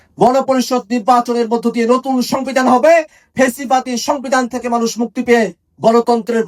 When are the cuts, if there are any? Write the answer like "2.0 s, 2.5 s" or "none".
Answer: none